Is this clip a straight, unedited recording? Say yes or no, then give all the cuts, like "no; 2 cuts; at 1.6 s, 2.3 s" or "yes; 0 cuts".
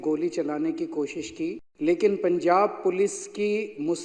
no; 1 cut; at 1.7 s